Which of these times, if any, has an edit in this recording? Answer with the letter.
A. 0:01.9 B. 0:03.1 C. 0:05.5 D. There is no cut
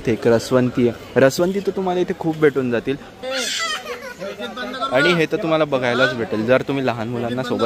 B